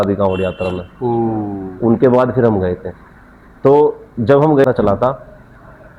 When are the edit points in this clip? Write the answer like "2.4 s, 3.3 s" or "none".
4.6 s